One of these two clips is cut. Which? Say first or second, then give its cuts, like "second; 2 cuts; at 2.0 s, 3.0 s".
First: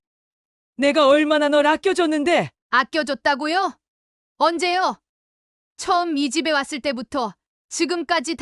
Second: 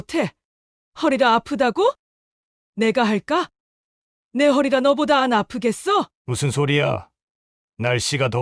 second; 1 cut; at 6.2 s